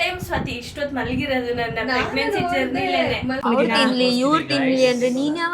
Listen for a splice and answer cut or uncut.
cut